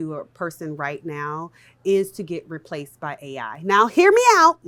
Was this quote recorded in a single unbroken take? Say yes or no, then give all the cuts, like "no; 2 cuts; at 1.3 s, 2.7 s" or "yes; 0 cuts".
yes; 0 cuts